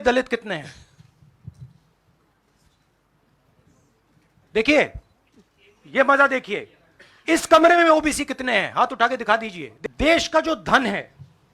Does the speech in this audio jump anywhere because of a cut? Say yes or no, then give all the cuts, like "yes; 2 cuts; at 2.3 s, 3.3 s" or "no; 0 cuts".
yes; 1 cut; at 9.7 s